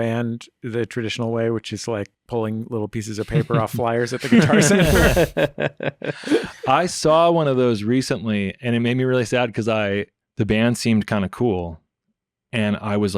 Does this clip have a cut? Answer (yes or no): yes